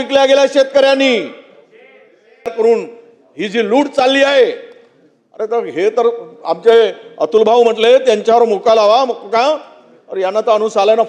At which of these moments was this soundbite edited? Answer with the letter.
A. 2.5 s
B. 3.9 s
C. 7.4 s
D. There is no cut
A